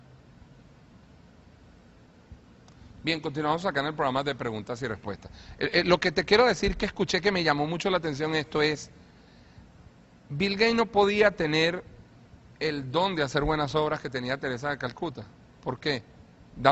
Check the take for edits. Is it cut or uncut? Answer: uncut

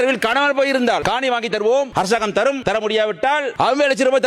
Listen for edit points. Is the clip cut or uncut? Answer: cut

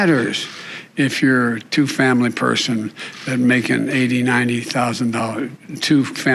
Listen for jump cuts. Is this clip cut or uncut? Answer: uncut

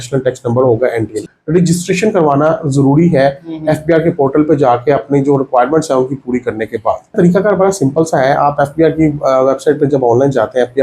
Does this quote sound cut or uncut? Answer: cut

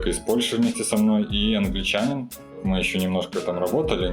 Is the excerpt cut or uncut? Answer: cut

